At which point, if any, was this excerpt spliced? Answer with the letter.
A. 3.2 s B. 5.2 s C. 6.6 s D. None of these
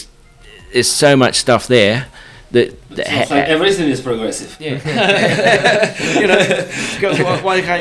D